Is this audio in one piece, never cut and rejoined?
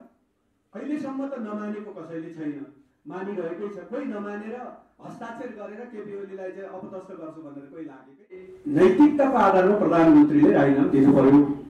no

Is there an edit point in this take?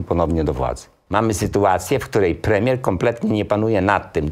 yes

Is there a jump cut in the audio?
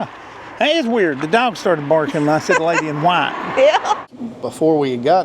yes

